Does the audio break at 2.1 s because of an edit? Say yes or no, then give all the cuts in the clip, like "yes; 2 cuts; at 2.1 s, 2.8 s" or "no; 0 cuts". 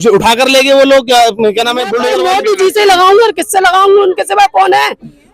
yes; 1 cut; at 2.1 s